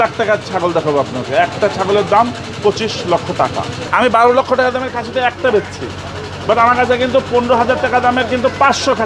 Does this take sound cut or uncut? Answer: cut